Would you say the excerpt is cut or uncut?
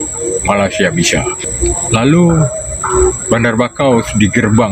cut